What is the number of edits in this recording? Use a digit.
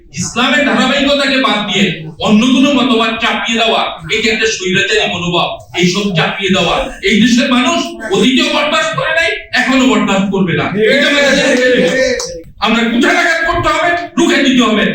1